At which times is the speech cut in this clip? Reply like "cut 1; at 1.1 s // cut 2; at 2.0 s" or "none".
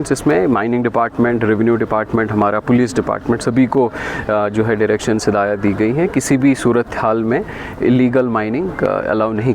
none